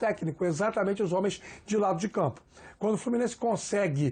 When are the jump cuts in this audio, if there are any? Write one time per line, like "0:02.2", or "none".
none